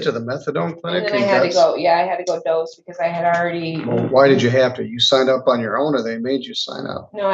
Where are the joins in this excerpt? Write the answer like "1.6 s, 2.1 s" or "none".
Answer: none